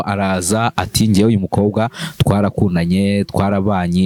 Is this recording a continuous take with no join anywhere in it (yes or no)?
yes